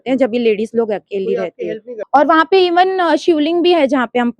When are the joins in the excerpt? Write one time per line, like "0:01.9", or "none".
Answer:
0:02.0